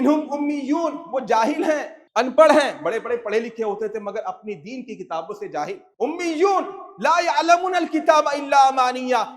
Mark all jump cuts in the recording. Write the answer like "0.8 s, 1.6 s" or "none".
2.0 s, 5.9 s